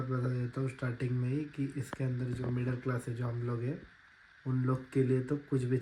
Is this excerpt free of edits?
yes; 0 cuts

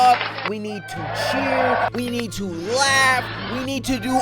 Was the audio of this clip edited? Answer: yes; 1 cut; at 1.9 s

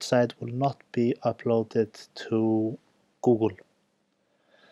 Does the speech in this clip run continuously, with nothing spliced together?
yes; 0 cuts

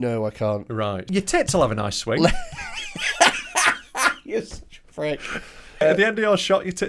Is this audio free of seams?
no; 2 cuts; at 1.0 s, 5.8 s

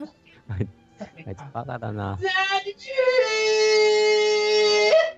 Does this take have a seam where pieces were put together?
yes; 1 cut; at 3.8 s

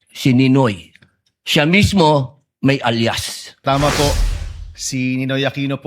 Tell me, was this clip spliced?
yes; 1 cut; at 3.5 s

